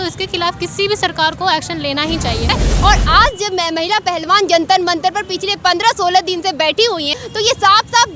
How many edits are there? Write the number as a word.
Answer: two